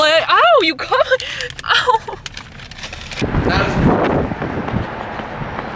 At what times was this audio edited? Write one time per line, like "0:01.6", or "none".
0:03.2